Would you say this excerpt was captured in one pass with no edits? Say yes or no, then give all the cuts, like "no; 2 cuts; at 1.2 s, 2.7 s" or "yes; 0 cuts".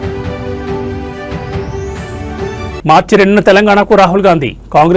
yes; 0 cuts